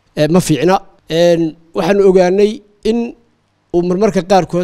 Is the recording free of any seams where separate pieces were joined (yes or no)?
no